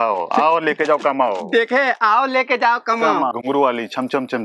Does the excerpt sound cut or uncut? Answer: uncut